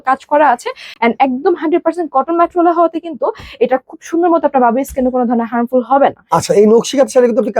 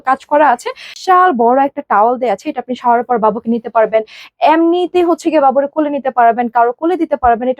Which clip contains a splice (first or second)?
second